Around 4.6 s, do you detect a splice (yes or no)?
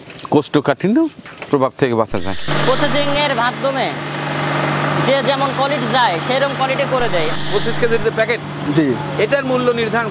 no